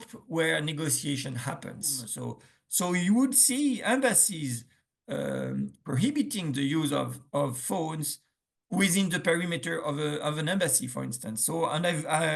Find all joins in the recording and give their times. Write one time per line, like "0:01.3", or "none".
0:02.1